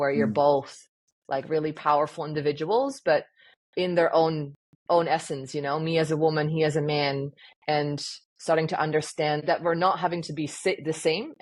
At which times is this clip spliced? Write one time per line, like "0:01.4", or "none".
0:09.4